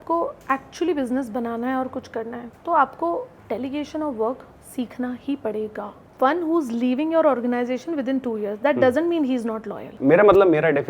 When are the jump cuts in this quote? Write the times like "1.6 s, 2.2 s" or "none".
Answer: 3.4 s, 6.0 s, 9.9 s